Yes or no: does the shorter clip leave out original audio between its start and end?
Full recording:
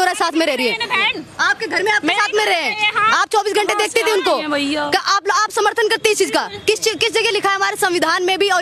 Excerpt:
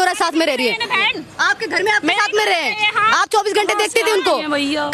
no